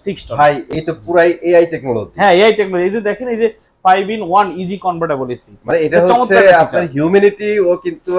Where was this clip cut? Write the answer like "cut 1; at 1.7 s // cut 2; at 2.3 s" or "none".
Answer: none

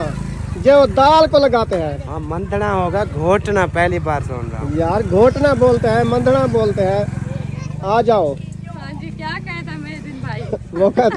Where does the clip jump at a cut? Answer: none

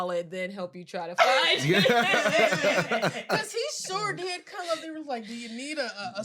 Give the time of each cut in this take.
none

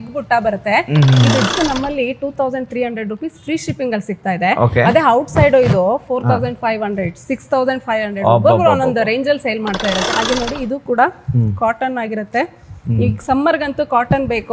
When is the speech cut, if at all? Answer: cut 1; at 1.5 s // cut 2; at 10.1 s

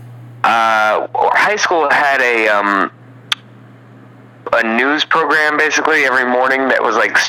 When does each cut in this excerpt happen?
cut 1; at 1.3 s // cut 2; at 4.5 s

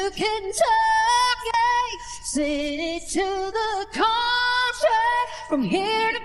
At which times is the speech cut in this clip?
none

